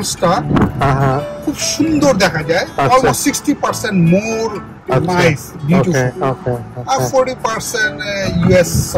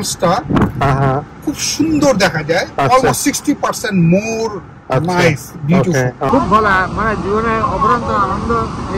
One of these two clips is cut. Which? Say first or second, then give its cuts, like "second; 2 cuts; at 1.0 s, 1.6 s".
second; 1 cut; at 6.3 s